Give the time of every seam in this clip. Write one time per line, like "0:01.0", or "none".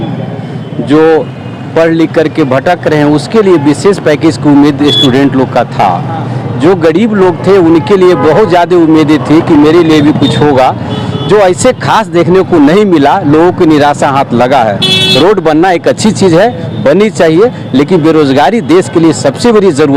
none